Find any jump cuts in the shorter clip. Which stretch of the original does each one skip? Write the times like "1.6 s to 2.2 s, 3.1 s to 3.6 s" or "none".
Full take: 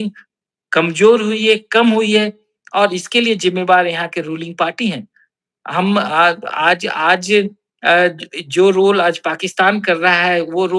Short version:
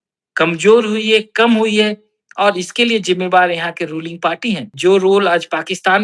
5.0 s to 8.4 s